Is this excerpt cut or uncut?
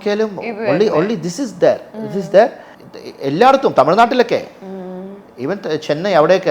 uncut